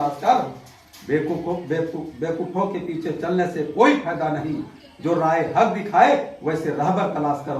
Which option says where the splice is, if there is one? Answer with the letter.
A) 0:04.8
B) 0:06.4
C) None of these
C